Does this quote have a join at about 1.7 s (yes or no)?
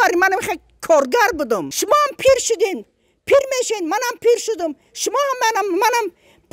yes